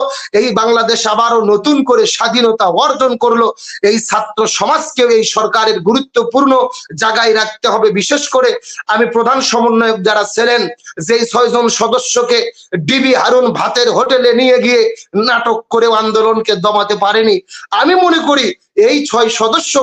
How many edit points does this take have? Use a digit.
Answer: 0